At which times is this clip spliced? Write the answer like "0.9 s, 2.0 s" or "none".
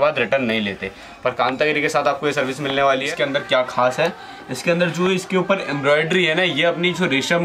3.1 s